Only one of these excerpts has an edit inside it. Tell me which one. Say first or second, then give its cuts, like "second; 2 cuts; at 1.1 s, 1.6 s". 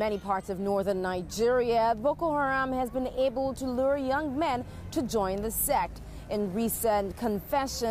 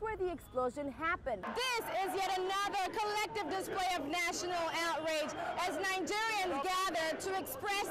second; 1 cut; at 1.4 s